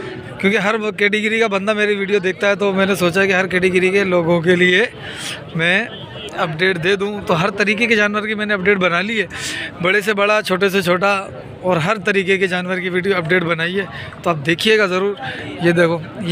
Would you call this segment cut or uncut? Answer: uncut